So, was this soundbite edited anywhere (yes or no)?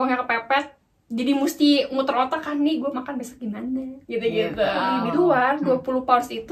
yes